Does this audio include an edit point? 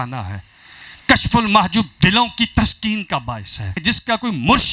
yes; 1 cut; at 3.7 s

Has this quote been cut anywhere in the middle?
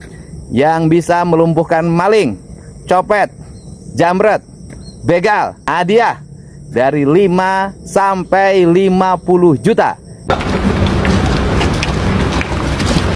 yes; 2 cuts; at 5.6 s, 10.2 s

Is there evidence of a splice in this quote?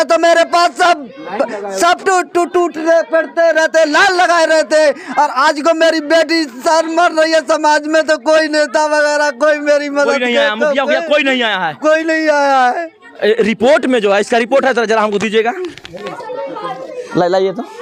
no; 0 cuts

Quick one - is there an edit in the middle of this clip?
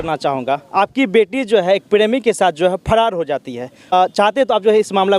yes; 1 cut; at 3.9 s

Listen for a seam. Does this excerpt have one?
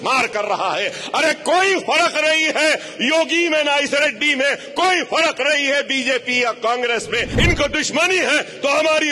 yes; 1 cut; at 7.3 s

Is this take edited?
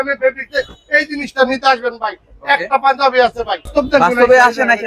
yes; 1 cut; at 3.7 s

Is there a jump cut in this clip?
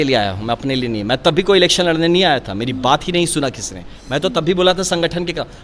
no; 0 cuts

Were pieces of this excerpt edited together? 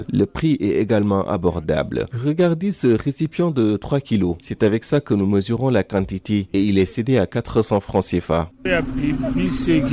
yes; 1 cut; at 8.6 s

